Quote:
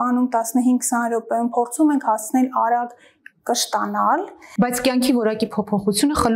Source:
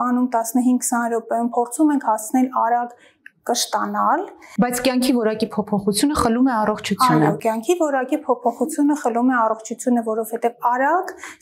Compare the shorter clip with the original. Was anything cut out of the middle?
no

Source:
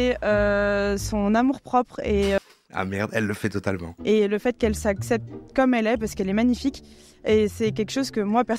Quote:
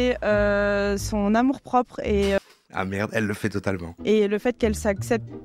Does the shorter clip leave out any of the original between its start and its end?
no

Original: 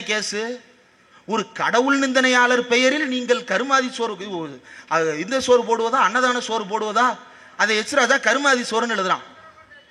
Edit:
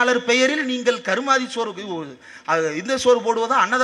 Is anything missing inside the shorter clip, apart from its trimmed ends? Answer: no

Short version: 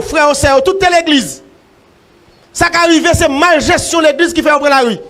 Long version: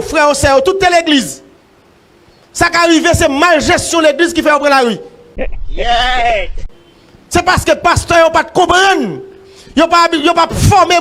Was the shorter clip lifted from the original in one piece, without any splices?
yes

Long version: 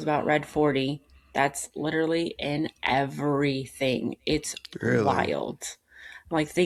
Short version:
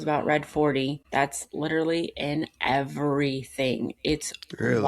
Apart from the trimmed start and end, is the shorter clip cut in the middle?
yes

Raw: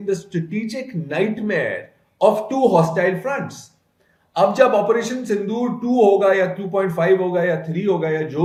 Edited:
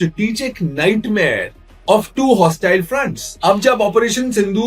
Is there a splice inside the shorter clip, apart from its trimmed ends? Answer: yes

